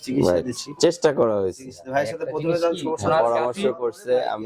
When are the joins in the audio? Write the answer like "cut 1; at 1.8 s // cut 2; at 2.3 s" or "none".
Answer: none